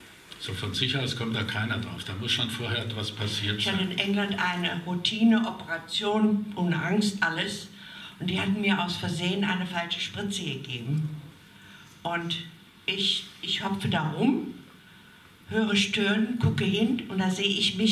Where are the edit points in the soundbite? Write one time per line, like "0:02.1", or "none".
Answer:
0:03.6